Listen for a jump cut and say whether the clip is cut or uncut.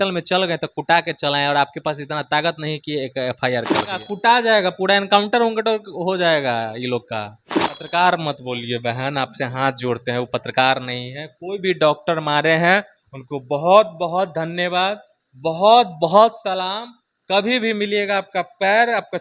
cut